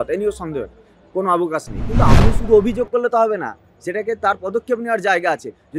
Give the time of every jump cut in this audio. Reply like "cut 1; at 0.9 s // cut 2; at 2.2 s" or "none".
cut 1; at 2.1 s